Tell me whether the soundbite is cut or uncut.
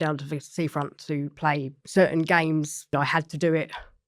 cut